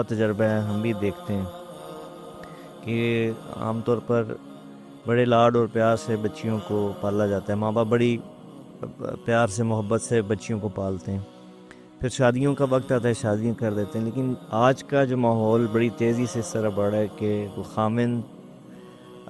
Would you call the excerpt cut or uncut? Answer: cut